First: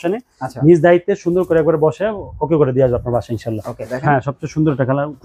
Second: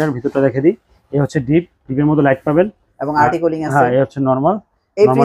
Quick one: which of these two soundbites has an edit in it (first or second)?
first